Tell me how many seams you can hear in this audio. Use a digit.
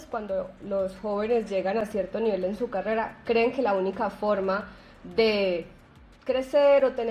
0